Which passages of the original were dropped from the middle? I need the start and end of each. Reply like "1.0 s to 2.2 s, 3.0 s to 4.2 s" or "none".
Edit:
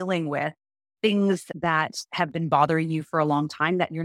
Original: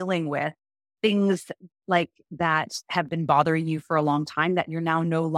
1.5 s to 2.3 s